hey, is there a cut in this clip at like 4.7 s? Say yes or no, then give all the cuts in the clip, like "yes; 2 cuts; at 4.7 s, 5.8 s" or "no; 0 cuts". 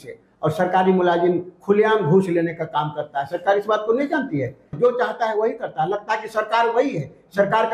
yes; 1 cut; at 4.7 s